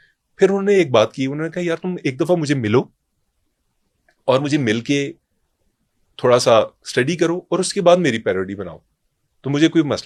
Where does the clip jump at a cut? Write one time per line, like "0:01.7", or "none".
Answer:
none